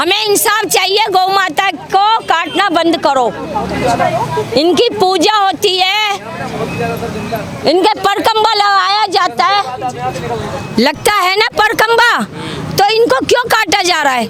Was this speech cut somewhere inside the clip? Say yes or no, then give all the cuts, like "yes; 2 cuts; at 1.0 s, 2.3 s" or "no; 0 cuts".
no; 0 cuts